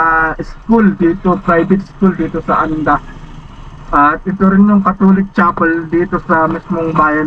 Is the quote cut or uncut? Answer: uncut